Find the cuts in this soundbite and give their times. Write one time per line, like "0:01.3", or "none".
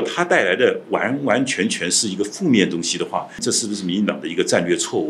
0:03.4